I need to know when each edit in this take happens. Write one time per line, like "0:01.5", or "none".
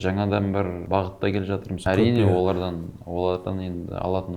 0:00.8
0:01.8